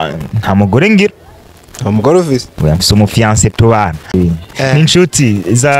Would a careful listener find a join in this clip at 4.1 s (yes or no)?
yes